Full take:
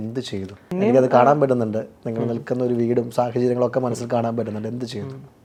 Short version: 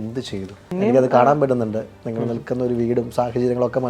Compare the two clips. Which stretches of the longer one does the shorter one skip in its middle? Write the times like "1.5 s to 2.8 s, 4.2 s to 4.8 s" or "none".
none